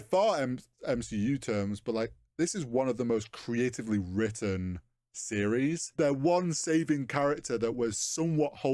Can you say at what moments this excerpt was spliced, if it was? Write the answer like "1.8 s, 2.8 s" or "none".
5.9 s